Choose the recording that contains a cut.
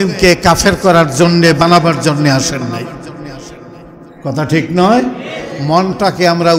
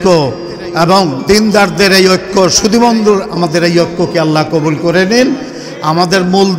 second; 1 cut; at 5.5 s

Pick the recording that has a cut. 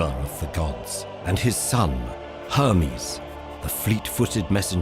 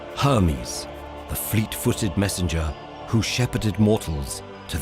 first; 1 cut; at 1.2 s

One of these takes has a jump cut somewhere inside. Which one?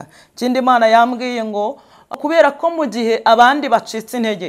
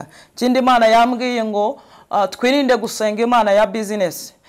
first; 1 cut; at 2.1 s

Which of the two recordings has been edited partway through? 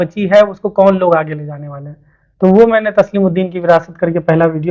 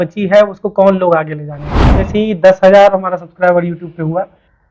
second; 1 cut; at 2.0 s

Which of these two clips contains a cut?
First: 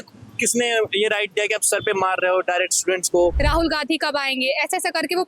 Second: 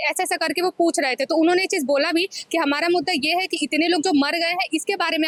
first; 1 cut; at 3.4 s

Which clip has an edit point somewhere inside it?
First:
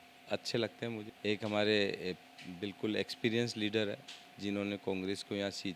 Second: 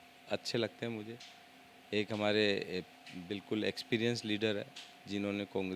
first; 1 cut; at 1.1 s

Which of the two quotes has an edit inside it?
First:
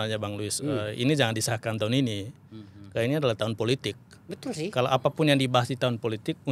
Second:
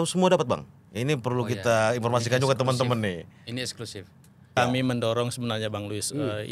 second; 1 cut; at 4.5 s

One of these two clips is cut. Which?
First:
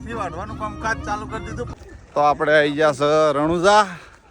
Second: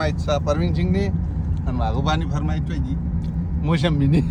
first; 1 cut; at 1.8 s

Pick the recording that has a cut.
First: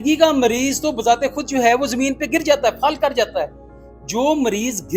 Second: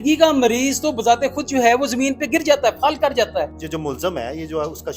second; 1 cut; at 3.6 s

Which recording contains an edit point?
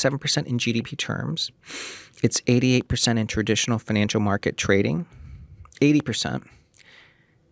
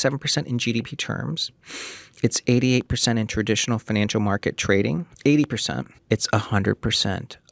second; 2 cuts; at 5.1 s, 5.9 s

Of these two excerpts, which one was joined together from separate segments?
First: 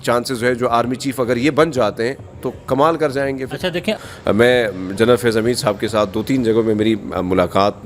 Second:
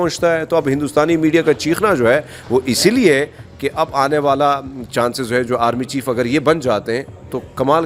first; 1 cut; at 4.0 s

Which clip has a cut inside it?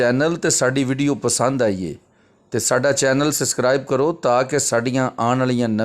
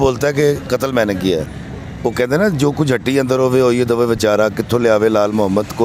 second; 1 cut; at 1.6 s

